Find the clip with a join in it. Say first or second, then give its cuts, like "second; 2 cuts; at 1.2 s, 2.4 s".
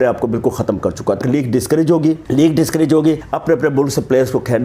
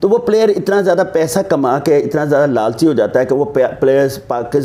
first; 3 cuts; at 1.2 s, 2.2 s, 3.3 s